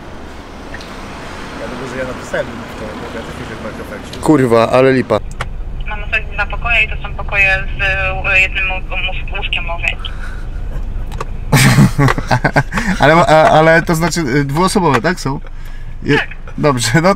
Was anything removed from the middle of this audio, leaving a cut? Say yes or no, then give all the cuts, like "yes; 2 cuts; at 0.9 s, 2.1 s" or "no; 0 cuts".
yes; 1 cut; at 5.2 s